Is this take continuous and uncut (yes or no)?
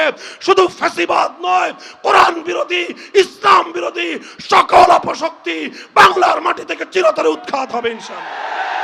yes